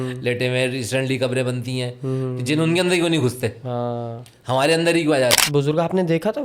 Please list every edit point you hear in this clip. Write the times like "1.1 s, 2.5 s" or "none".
5.4 s